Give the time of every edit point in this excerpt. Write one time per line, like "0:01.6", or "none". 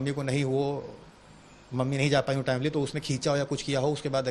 none